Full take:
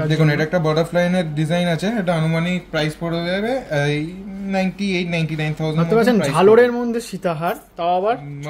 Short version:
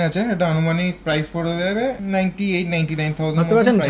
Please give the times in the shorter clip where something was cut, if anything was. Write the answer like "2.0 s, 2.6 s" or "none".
2.0 s